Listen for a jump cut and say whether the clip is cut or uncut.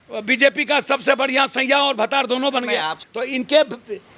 cut